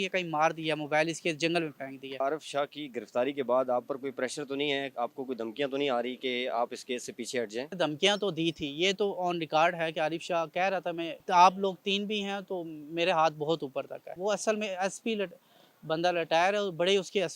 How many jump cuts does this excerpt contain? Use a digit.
4